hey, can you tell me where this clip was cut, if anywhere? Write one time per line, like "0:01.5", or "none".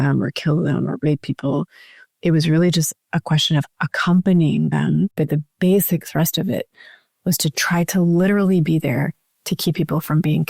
0:05.2